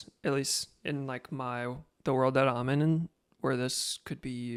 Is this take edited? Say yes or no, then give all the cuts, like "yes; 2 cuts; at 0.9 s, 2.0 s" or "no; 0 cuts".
no; 0 cuts